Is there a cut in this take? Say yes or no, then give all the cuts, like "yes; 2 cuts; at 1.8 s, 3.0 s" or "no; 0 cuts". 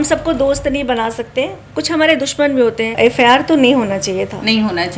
yes; 1 cut; at 2.9 s